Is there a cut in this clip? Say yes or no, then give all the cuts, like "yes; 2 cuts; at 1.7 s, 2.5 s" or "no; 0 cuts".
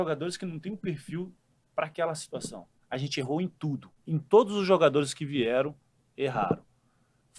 yes; 2 cuts; at 2.7 s, 3.9 s